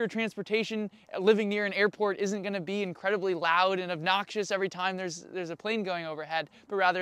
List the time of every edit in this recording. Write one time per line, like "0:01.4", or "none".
none